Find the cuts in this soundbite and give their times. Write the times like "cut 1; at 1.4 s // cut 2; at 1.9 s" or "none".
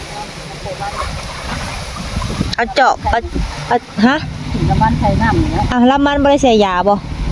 none